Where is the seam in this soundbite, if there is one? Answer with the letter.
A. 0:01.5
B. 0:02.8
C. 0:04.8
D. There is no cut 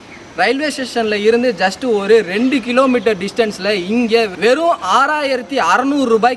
D